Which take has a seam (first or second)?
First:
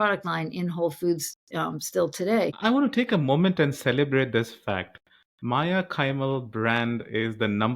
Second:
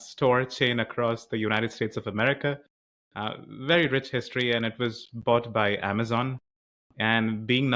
first